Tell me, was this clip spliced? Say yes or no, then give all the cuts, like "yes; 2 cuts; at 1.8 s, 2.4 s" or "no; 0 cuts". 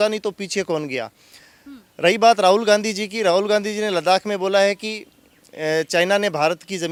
no; 0 cuts